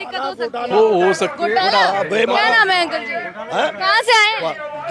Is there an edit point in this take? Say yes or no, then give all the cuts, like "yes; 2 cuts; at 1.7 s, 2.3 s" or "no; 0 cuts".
no; 0 cuts